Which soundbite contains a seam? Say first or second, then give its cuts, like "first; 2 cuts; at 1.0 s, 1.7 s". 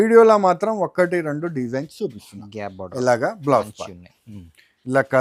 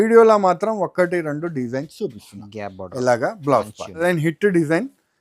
second; 1 cut; at 4.0 s